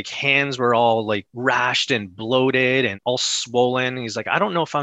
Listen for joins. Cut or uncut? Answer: cut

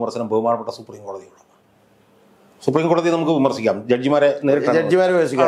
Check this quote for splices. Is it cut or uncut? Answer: uncut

